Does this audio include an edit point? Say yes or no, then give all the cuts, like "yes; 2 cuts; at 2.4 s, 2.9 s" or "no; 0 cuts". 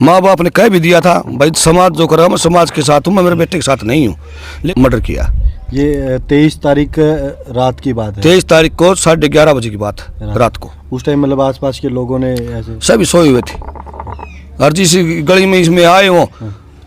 yes; 1 cut; at 4.6 s